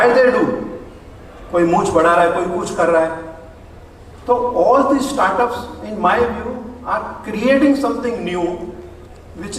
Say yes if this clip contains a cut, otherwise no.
no